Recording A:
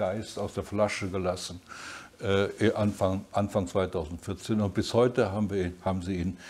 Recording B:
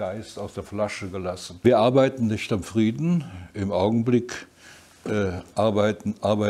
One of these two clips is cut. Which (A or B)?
B